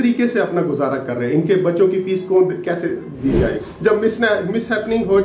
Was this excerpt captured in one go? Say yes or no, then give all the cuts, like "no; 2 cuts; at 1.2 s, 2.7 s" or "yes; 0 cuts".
no; 1 cut; at 3.7 s